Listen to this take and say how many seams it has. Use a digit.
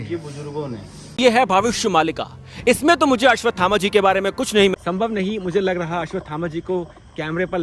2